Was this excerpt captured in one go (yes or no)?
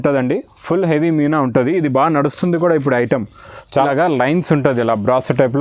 no